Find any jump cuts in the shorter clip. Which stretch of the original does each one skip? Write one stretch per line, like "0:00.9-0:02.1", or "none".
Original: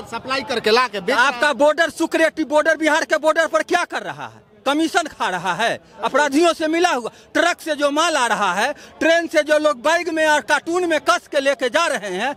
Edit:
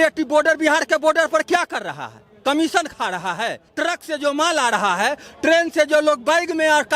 0:05.8-0:07.2